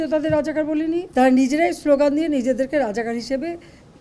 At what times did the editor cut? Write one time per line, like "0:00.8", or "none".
0:01.1